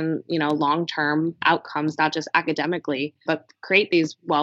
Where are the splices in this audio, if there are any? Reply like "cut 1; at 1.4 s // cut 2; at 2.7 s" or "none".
cut 1; at 1.4 s // cut 2; at 3.1 s